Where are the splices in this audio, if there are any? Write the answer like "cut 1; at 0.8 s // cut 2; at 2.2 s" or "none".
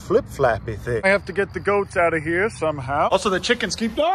cut 1; at 1.1 s // cut 2; at 3.1 s